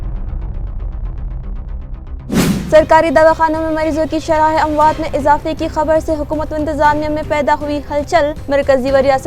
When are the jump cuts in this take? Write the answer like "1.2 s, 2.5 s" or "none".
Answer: none